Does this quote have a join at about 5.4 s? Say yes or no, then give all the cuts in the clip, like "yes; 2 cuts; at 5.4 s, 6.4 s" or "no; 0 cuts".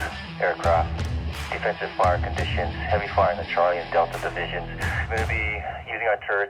no; 0 cuts